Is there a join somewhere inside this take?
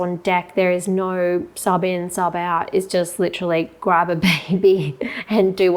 no; 0 cuts

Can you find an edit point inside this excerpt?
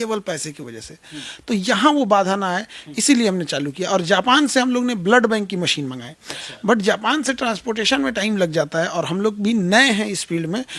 no; 0 cuts

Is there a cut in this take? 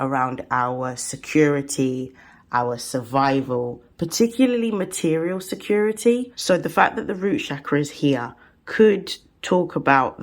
yes; 1 cut; at 6.3 s

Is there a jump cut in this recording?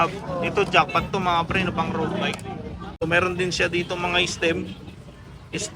yes; 1 cut; at 3.0 s

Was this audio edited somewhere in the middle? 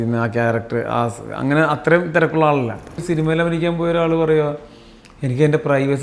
yes; 1 cut; at 3.0 s

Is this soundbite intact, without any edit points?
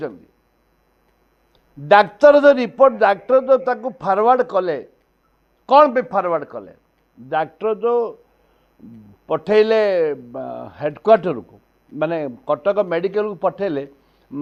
yes; 0 cuts

